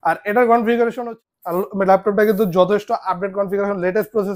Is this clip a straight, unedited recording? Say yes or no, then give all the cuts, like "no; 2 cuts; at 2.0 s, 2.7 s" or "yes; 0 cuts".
no; 1 cut; at 1.1 s